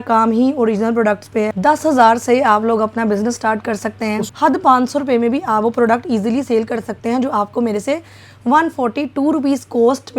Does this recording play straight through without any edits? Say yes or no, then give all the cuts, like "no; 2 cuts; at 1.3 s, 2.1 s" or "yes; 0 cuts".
no; 2 cuts; at 1.5 s, 4.3 s